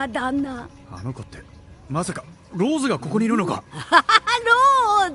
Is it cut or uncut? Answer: uncut